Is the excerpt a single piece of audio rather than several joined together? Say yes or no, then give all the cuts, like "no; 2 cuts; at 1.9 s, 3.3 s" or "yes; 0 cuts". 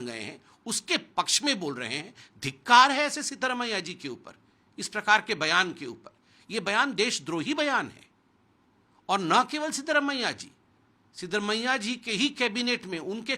yes; 0 cuts